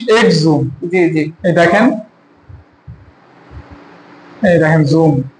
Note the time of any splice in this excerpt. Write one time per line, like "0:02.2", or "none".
none

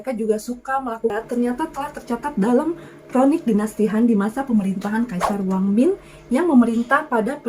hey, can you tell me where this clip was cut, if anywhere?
0:01.1

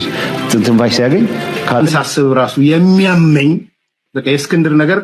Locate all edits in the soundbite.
0:01.8

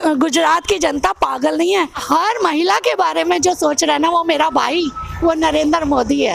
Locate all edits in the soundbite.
0:02.0

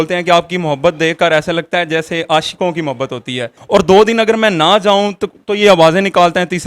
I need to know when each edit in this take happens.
0:03.5

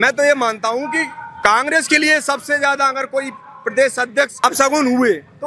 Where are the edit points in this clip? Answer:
0:01.3
0:04.4

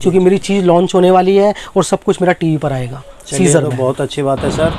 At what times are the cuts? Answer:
none

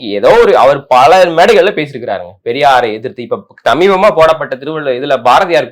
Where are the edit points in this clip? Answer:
none

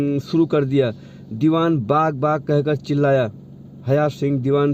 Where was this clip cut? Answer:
none

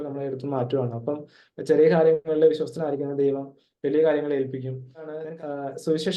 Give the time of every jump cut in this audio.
0:05.2

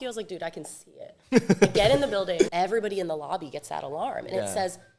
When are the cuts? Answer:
0:02.5

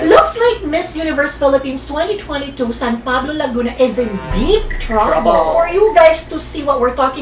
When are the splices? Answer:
0:05.5

